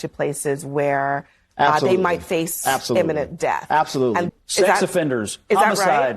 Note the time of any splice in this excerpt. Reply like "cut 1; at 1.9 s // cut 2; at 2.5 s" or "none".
cut 1; at 4.3 s